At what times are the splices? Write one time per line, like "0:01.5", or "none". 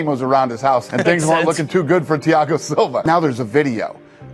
0:03.0

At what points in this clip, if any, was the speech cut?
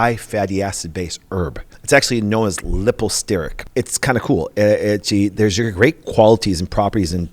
0:01.7
0:03.6

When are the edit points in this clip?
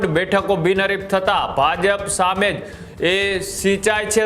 none

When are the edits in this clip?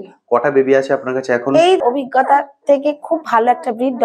0:01.8

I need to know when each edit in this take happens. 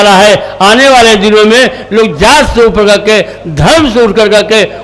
none

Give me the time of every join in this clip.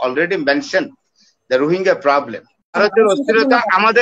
0:02.8

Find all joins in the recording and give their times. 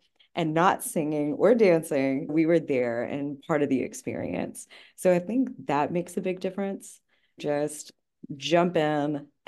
0:07.4

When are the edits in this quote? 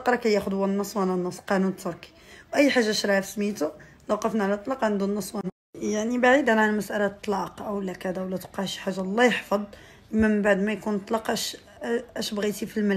none

